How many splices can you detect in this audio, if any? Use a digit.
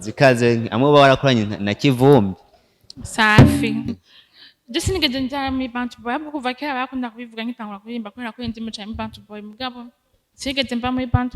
1